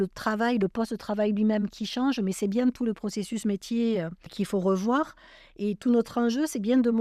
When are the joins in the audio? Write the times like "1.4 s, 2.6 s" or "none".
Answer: 4.2 s